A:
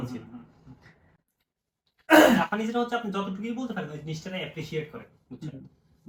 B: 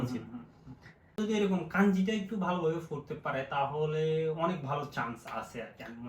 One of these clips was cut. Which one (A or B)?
B